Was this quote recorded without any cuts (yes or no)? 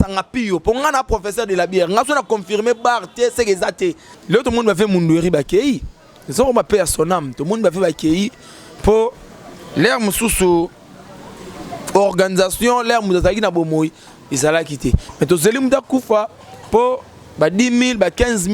no